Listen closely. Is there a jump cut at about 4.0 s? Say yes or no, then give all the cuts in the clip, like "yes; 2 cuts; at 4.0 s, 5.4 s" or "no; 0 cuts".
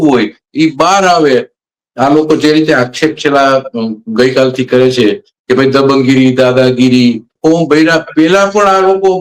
no; 2 cuts; at 1.6 s, 7.3 s